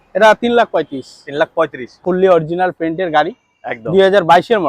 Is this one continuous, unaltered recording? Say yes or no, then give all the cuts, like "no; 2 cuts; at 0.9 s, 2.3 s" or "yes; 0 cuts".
no; 1 cut; at 2.0 s